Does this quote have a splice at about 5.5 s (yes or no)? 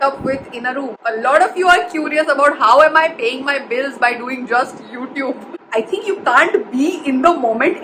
yes